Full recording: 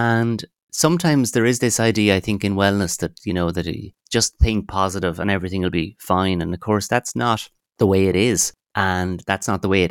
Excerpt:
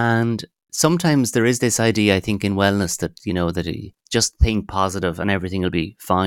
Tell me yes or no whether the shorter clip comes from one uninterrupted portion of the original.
yes